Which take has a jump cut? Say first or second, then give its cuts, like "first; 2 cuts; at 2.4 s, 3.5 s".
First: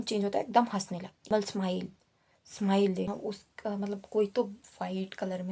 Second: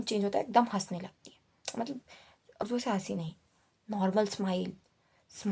first; 2 cuts; at 1.3 s, 3.1 s